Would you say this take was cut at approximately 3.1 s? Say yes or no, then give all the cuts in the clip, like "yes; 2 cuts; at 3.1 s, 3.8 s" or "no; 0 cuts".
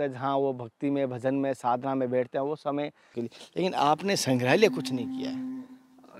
yes; 1 cut; at 3.1 s